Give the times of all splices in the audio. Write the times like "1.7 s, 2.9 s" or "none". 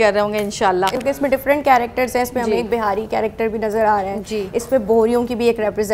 1.0 s